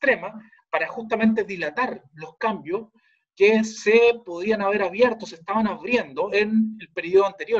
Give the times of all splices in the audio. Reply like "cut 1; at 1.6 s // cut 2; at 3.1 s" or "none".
cut 1; at 6.3 s